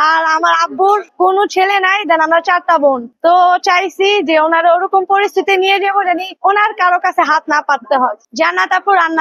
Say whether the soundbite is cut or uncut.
cut